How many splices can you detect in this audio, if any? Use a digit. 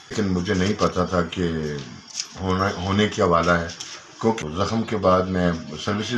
1